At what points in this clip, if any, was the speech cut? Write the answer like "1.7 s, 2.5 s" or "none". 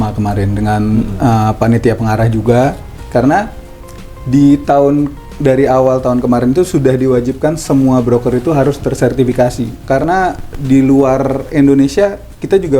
3.0 s, 9.6 s